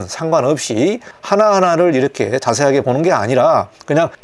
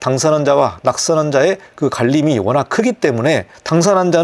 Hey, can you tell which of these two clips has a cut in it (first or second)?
first